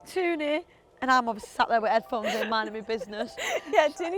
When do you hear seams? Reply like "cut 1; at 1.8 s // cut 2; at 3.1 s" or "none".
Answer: none